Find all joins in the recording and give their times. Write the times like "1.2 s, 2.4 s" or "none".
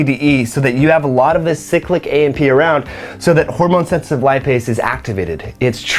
none